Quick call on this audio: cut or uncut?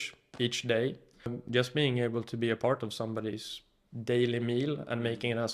cut